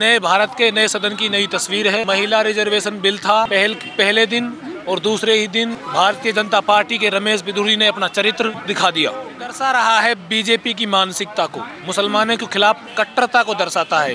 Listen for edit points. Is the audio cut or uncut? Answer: cut